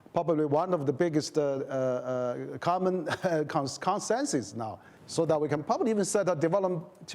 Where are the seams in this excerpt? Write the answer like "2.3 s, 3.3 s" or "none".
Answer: none